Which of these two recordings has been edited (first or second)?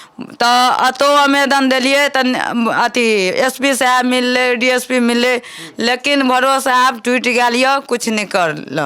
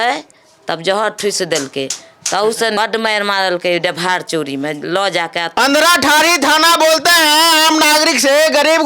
second